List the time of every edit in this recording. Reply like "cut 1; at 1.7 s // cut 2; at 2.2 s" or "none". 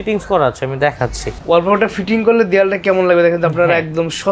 cut 1; at 1.3 s